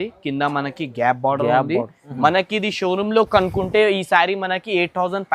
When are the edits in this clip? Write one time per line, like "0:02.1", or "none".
0:02.0

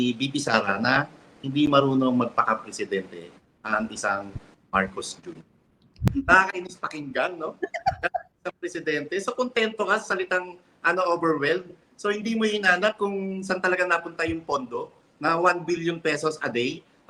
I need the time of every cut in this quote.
0:06.0

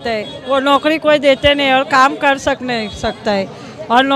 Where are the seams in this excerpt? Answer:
none

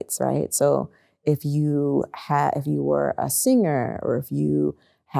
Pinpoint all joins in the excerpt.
none

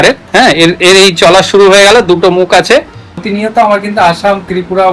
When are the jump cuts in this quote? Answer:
0:03.2

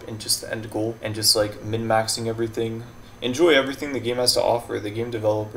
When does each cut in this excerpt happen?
0:01.0

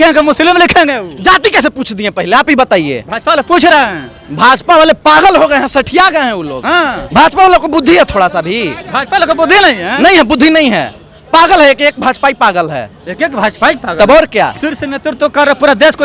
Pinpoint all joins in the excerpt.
none

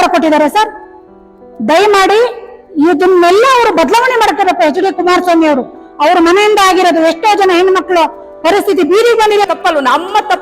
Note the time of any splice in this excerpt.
0:09.4

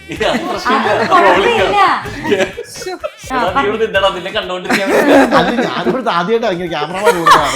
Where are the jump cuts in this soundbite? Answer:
0:03.1

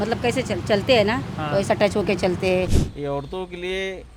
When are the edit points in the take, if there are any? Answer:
0:02.8

